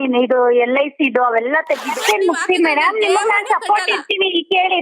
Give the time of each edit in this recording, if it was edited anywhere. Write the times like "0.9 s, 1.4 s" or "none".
1.9 s